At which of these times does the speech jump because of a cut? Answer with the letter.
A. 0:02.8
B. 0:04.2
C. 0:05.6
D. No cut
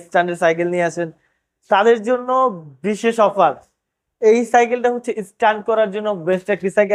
D